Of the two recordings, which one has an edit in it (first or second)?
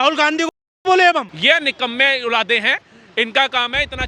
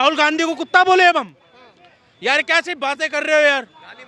first